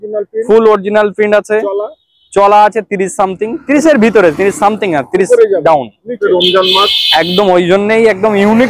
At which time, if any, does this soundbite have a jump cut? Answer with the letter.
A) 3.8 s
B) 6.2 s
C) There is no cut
B